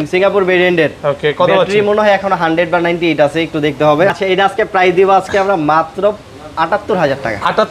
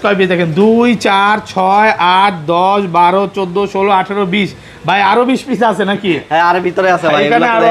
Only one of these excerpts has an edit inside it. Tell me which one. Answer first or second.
first